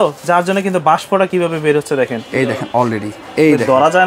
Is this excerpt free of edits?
yes; 0 cuts

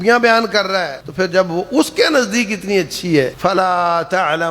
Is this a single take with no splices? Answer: no; 2 cuts; at 1.0 s, 3.3 s

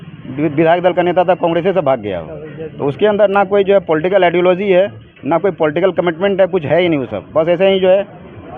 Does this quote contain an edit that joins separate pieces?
no; 0 cuts

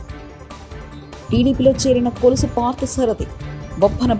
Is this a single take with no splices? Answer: no; 1 cut; at 1.0 s

